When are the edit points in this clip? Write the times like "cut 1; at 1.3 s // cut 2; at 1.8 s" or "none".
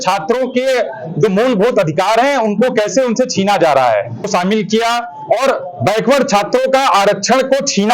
cut 1; at 4.3 s